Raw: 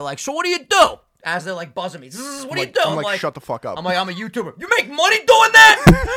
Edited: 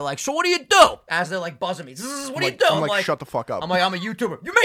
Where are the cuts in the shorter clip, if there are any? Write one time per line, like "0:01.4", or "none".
0:01.0